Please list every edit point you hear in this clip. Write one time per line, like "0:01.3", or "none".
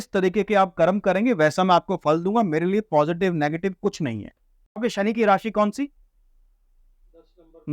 0:04.7